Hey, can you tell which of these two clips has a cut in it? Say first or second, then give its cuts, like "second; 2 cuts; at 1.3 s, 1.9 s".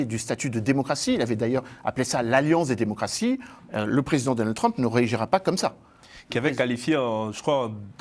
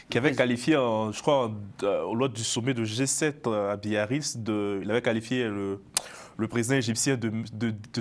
first; 1 cut; at 3.6 s